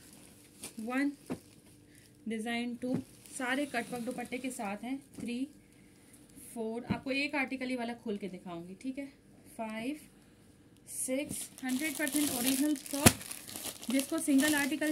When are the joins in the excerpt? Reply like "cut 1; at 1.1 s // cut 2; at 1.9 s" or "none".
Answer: cut 1; at 11.5 s

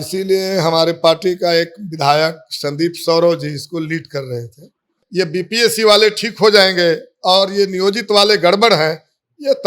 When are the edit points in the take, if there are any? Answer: cut 1; at 5.0 s

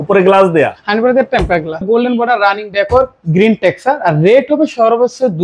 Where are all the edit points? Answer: cut 1; at 1.8 s

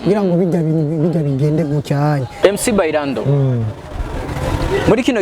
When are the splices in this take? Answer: cut 1; at 2.4 s

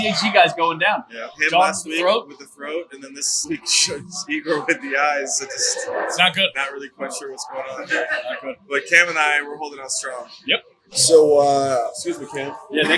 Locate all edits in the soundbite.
cut 1; at 10.9 s

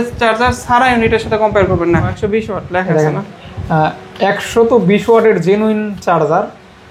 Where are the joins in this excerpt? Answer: cut 1; at 2.1 s

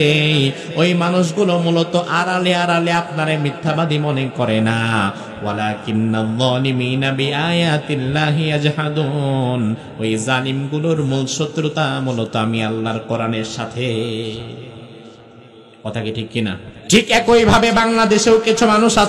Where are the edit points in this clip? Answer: cut 1; at 16.7 s

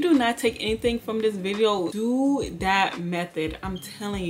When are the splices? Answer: cut 1; at 1.9 s

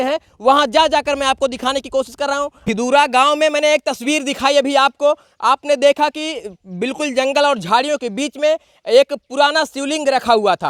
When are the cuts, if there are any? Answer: none

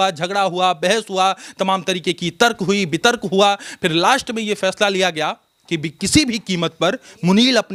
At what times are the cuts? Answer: none

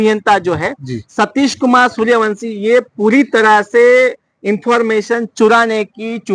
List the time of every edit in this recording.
none

